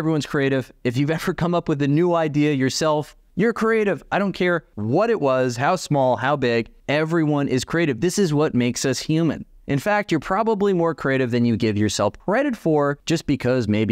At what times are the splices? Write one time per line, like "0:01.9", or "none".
0:03.2
0:04.7
0:06.8
0:12.2
0:13.0